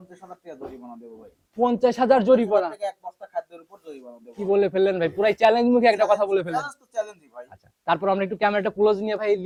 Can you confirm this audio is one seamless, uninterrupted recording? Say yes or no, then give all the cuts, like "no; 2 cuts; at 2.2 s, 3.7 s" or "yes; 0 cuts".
yes; 0 cuts